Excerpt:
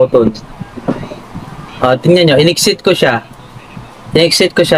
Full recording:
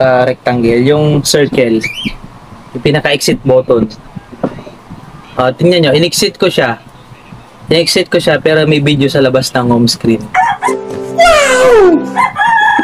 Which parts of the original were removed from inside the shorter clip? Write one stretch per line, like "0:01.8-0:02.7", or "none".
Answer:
none